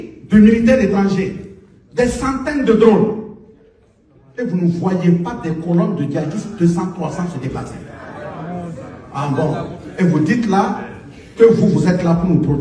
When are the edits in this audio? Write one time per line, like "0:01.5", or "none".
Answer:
none